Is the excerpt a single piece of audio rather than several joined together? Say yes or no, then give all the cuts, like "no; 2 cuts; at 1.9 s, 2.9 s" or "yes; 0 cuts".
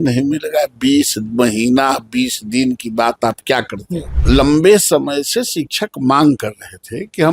no; 1 cut; at 4.2 s